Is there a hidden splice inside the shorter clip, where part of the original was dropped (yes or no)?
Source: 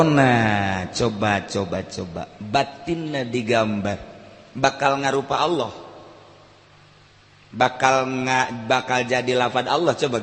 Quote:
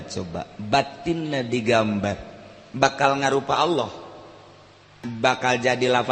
yes